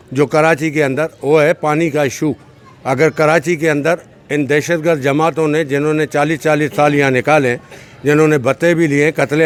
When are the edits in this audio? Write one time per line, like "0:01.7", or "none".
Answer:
none